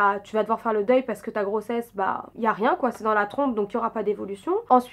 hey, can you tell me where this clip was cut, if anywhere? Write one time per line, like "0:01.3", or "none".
none